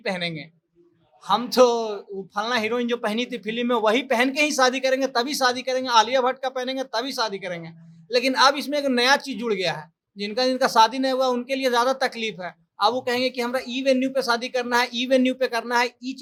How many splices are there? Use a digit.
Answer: 0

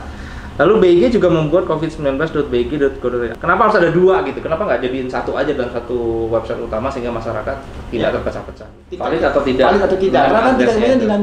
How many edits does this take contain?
2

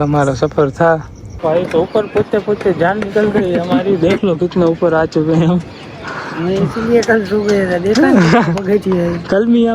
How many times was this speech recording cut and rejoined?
1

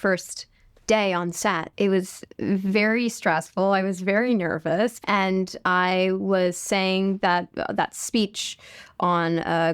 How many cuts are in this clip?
2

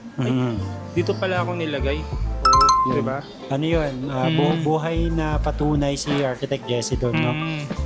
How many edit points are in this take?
0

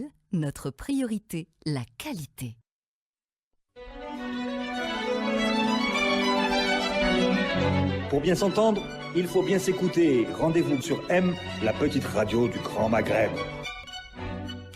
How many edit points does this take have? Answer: 1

